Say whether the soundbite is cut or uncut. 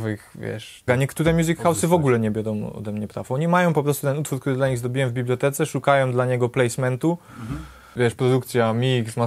cut